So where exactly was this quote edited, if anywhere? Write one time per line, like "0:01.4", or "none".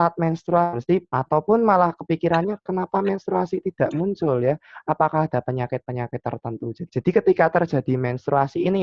0:01.1
0:06.8